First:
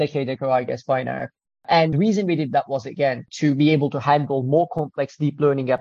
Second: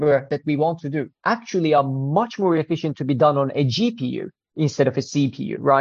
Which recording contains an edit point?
first; 2 cuts; at 1.9 s, 3.3 s

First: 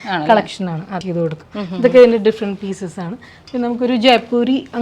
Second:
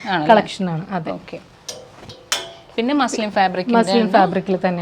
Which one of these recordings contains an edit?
first; 1 cut; at 1.1 s

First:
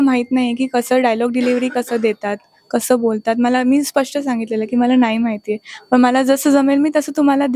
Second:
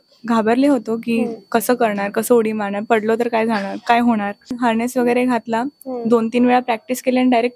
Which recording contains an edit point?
second; 1 cut; at 4.5 s

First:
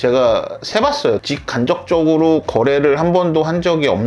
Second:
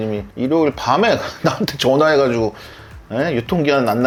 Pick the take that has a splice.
first; 1 cut; at 1.2 s

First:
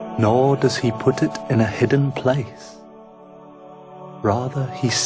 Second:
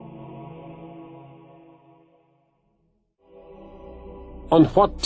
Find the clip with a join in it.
first; 1 cut; at 1.6 s

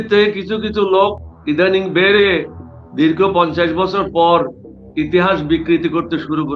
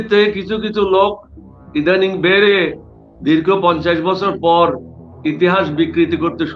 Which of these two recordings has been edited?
first; 1 cut; at 1.3 s

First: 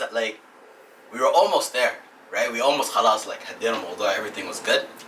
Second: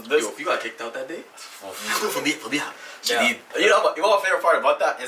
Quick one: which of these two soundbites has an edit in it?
second; 1 cut; at 3.4 s

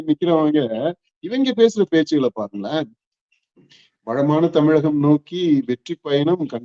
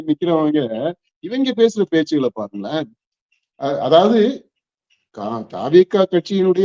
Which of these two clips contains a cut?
first; 1 cut; at 3.4 s

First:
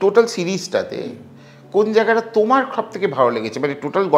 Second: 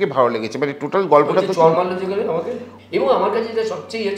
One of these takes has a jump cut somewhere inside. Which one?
second; 1 cut; at 2.6 s

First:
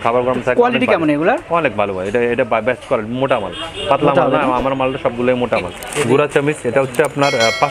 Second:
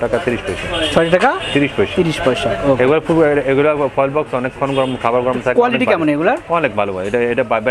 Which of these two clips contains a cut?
first; 1 cut; at 5.8 s

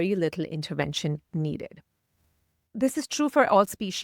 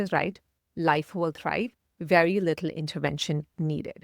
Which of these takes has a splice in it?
first; 1 cut; at 2.8 s

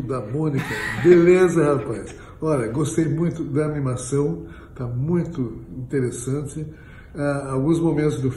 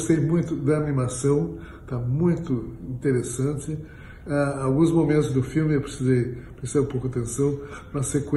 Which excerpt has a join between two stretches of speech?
first; 1 cut; at 1.8 s

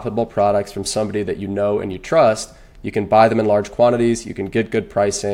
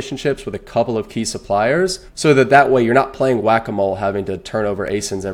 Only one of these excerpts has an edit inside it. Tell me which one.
second; 1 cut; at 2.1 s

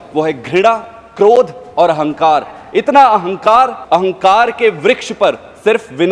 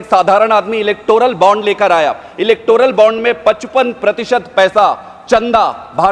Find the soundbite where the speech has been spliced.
first; 1 cut; at 3.8 s

